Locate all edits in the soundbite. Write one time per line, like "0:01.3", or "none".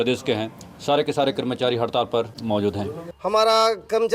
0:02.9